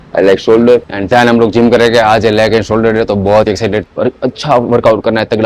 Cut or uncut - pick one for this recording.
cut